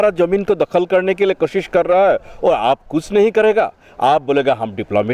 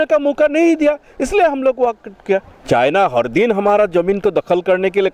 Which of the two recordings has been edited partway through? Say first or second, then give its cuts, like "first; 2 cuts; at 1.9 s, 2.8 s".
second; 1 cut; at 2.5 s